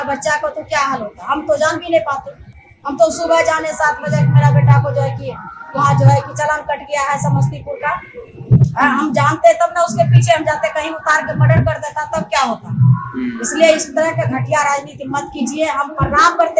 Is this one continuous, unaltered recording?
yes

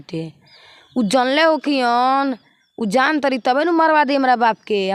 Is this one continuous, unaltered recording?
yes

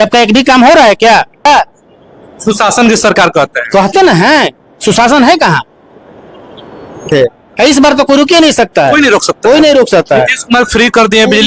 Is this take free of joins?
no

